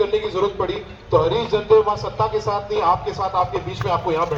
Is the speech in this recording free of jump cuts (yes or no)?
yes